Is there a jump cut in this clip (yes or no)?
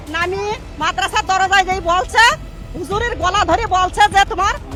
no